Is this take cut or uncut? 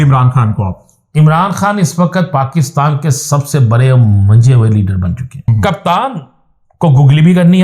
cut